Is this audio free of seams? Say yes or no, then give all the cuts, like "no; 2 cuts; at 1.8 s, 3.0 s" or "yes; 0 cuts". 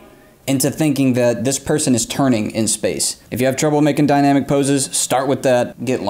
no; 1 cut; at 3.2 s